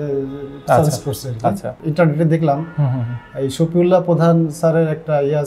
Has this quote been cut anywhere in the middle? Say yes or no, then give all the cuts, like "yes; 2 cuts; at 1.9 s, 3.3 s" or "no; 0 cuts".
yes; 1 cut; at 1.8 s